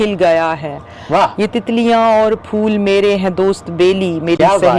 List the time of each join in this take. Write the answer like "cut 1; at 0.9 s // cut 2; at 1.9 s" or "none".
none